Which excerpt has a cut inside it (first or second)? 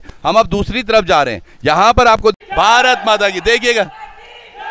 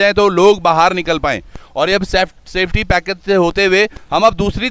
first